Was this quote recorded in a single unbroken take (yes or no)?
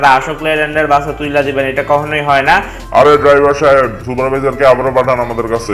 no